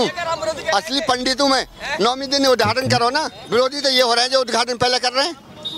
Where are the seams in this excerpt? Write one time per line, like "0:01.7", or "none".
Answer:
0:03.2